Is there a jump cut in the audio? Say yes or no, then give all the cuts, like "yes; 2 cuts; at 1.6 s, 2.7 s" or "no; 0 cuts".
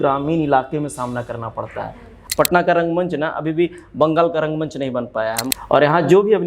yes; 2 cuts; at 2.1 s, 5.5 s